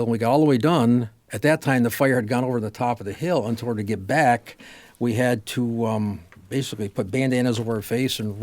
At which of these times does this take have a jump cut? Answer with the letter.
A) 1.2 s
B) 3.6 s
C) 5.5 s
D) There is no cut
A